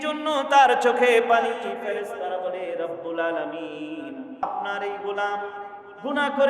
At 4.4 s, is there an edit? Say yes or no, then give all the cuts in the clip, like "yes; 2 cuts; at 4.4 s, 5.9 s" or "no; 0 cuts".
yes; 1 cut; at 4.4 s